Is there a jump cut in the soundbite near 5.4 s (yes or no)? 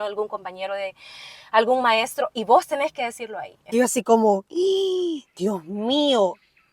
no